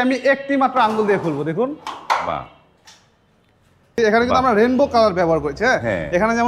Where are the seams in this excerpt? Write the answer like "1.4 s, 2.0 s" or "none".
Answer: 4.0 s